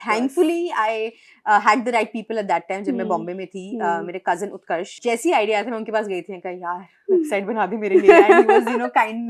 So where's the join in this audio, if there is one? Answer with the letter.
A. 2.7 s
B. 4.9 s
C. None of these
B